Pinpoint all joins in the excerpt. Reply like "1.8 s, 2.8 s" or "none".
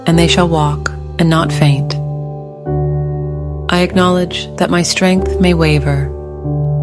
1.8 s, 3.7 s